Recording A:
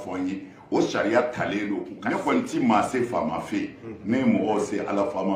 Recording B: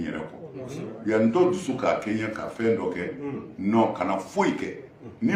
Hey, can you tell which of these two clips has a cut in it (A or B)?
A